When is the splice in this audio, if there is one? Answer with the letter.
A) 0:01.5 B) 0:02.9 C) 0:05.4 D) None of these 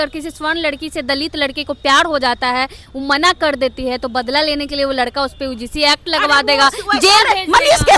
D